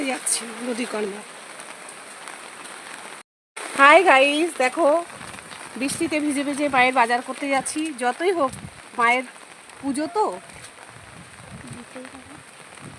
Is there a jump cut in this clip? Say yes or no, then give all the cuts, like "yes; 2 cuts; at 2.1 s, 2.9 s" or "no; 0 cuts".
yes; 1 cut; at 3.8 s